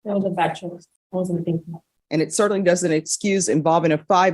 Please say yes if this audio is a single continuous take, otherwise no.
no